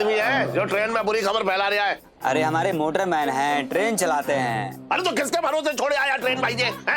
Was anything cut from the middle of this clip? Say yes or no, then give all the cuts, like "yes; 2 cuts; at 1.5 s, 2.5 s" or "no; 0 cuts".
yes; 1 cut; at 2.1 s